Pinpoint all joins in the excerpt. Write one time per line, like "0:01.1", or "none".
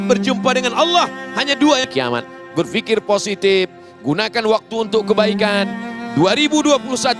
0:01.9